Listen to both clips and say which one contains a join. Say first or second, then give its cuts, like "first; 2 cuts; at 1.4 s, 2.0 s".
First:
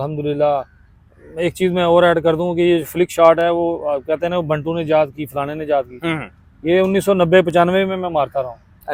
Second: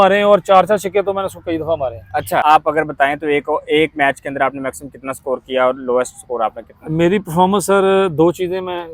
second; 1 cut; at 2.4 s